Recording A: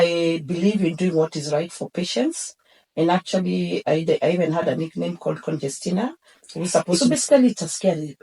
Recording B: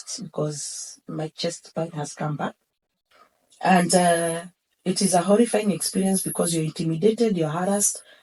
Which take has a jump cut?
A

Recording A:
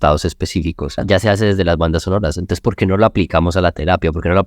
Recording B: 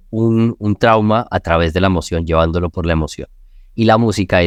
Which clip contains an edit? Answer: A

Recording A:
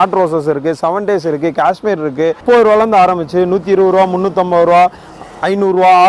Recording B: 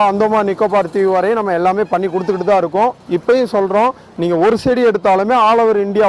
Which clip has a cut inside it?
A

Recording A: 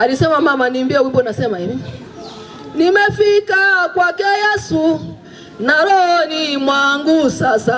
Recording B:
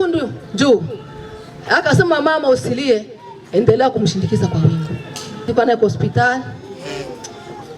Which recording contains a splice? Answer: B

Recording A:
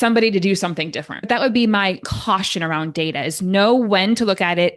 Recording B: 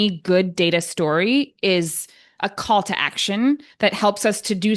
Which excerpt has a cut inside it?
A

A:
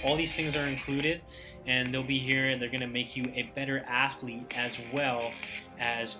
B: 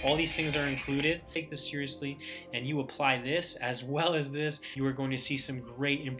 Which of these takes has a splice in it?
B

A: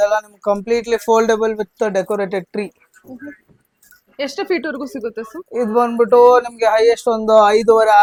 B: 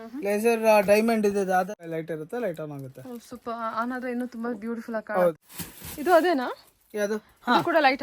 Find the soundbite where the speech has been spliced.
B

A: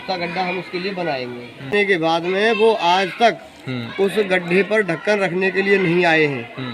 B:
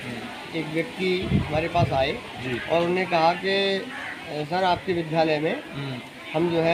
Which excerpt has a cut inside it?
A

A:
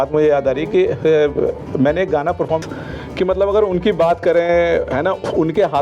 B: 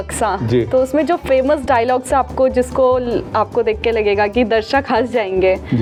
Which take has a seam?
A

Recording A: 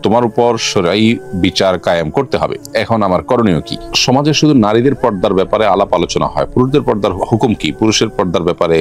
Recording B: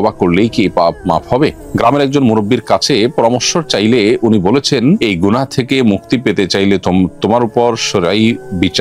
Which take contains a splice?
A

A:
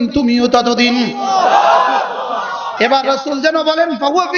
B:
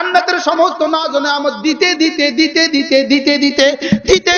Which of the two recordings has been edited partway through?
A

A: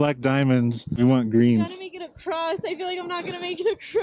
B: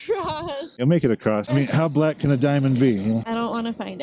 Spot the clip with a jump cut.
B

